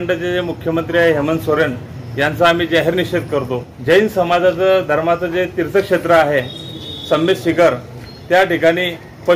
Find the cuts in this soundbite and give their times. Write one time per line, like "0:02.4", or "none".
0:03.7

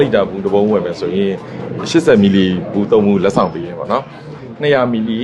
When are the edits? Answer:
none

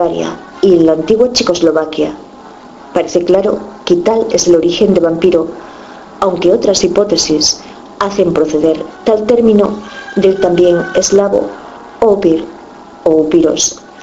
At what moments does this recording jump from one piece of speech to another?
0:09.0

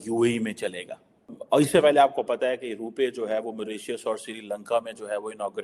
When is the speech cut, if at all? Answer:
0:01.3

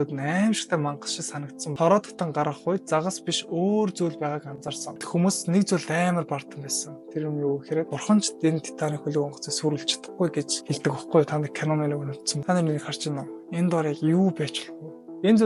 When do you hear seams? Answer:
0:01.6
0:05.0
0:12.3

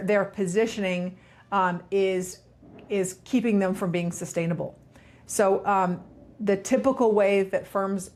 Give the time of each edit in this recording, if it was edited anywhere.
none

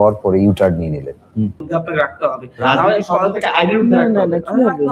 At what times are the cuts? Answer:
0:01.7

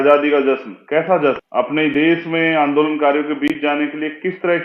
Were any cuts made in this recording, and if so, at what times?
0:01.4

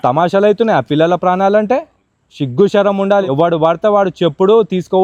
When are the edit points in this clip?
none

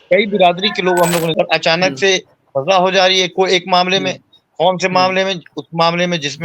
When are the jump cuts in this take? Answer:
0:01.3

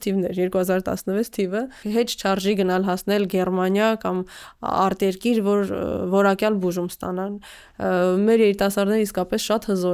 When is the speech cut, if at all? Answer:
0:01.8

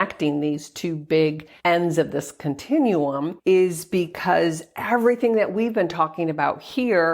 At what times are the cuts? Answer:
0:01.5
0:03.3

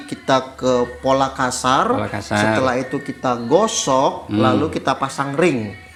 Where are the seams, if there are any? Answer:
none

